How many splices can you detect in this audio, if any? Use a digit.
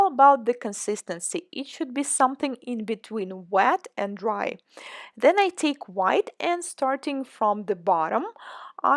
1